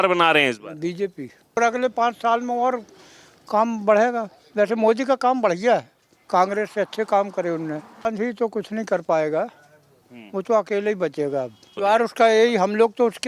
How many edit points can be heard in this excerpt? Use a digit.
4